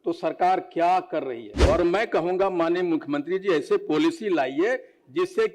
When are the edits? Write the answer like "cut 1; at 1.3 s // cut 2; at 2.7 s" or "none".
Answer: cut 1; at 1.5 s